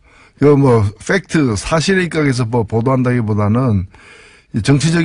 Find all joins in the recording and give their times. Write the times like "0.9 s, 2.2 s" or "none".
2.3 s